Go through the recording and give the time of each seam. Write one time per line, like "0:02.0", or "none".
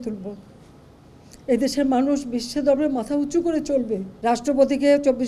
0:04.1